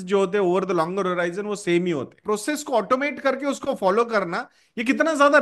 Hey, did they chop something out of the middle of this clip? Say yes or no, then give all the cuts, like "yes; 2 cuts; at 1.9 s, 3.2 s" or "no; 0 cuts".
yes; 1 cut; at 2.2 s